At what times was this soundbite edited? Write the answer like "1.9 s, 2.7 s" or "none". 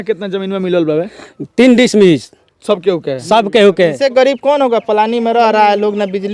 4.0 s